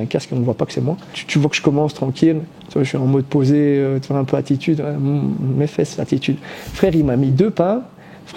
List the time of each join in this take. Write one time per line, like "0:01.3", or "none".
0:01.1